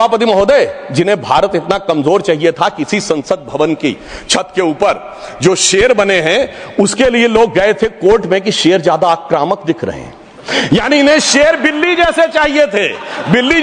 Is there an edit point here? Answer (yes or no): no